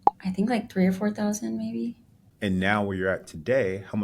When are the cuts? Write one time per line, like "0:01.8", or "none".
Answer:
0:02.2